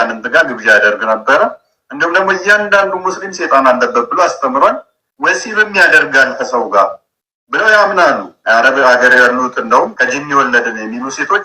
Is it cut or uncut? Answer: cut